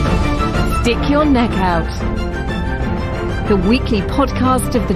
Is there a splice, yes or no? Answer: no